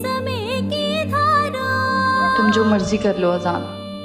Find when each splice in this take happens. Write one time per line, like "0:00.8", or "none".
0:02.4